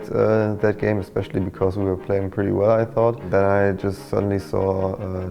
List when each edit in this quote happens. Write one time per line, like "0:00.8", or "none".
0:03.2